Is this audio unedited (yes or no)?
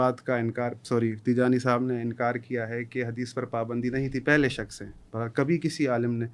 yes